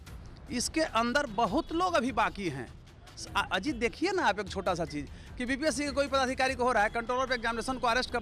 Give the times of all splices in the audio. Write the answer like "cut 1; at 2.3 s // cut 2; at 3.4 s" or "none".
none